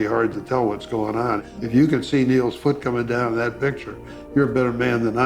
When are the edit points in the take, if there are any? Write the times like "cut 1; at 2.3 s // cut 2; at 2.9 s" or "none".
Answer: cut 1; at 1.5 s